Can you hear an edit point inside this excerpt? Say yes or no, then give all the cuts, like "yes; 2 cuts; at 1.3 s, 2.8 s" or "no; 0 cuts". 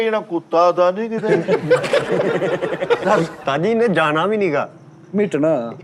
yes; 1 cut; at 3.4 s